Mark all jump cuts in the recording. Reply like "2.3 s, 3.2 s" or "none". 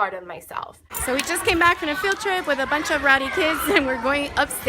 1.1 s

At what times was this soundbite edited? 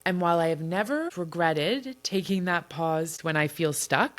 1.1 s, 3.2 s

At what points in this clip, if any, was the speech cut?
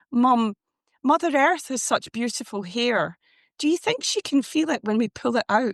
none

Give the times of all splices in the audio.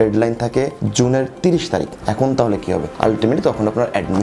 none

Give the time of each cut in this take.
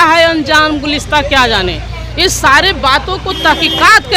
none

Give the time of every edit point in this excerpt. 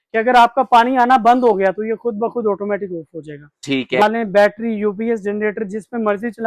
4.0 s

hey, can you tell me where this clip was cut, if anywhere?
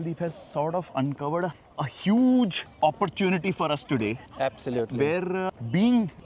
none

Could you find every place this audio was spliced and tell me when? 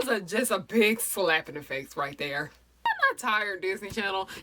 2.9 s

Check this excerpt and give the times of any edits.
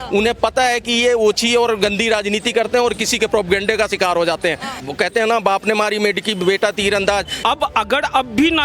4.8 s, 7.3 s

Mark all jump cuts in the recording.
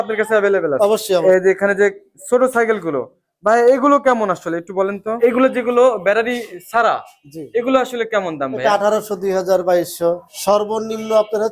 1.2 s, 5.2 s, 10.3 s

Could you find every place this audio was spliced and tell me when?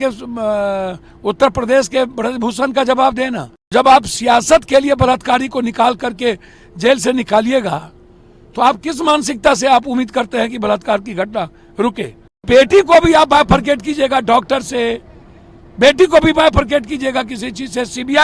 3.7 s, 12.4 s

